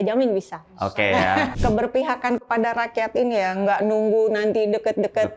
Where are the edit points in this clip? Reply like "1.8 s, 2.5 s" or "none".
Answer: 1.5 s